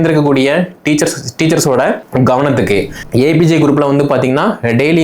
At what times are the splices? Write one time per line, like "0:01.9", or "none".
0:02.0
0:03.0